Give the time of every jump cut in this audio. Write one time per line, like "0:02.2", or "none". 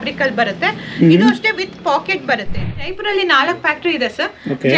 0:02.8